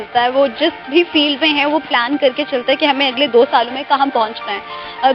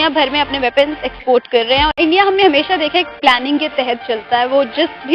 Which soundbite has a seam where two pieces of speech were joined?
second; 1 cut; at 1.9 s

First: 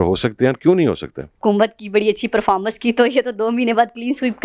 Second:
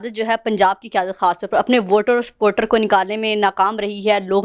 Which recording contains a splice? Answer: first; 1 cut; at 1.4 s

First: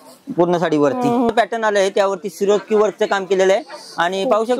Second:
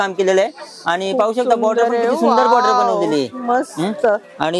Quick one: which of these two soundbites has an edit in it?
first; 1 cut; at 1.3 s

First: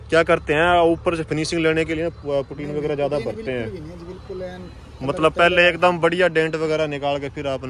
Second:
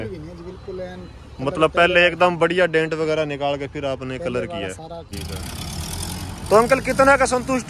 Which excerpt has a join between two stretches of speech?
second; 1 cut; at 5.1 s

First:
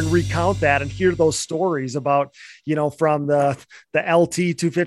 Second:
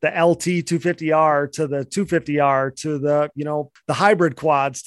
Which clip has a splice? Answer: second; 1 cut; at 3.7 s

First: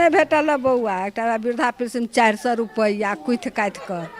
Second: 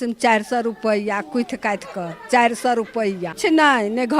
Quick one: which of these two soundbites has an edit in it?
second; 1 cut; at 3.3 s

